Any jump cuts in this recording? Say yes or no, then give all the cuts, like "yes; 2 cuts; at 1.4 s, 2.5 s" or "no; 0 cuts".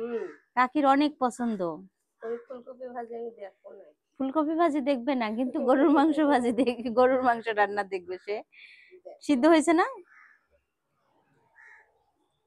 no; 0 cuts